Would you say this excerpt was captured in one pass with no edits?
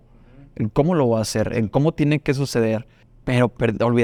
yes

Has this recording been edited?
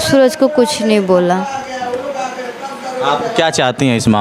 no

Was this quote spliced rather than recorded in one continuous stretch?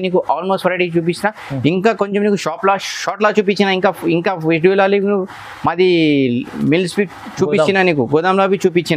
no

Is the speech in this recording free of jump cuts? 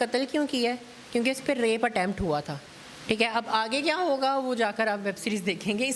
yes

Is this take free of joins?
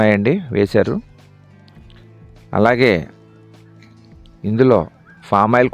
no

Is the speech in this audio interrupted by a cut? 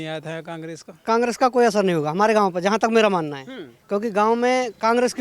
yes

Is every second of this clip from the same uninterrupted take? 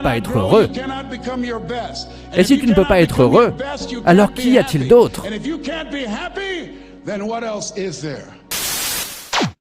no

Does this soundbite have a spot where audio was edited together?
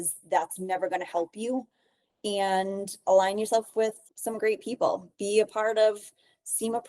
yes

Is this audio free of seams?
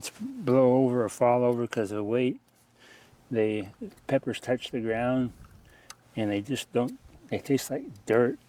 yes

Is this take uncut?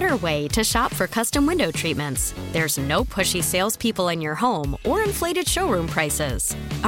yes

